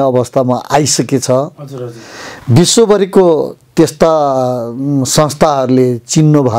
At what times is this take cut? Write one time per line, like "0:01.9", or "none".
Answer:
none